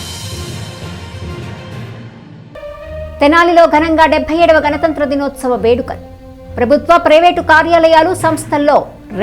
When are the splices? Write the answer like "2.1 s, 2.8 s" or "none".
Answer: 2.4 s